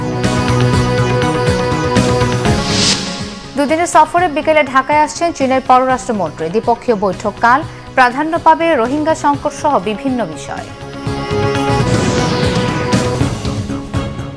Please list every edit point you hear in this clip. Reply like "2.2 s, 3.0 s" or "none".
13.2 s